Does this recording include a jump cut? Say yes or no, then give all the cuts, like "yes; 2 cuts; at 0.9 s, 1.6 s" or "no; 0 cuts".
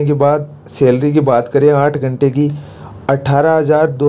no; 0 cuts